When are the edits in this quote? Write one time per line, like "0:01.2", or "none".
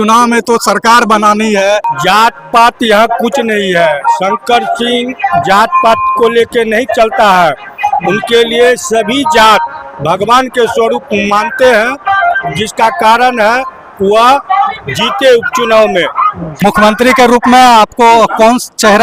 0:01.9
0:16.6